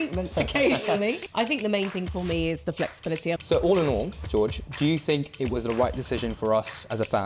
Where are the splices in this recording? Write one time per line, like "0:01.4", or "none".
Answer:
0:01.2
0:03.4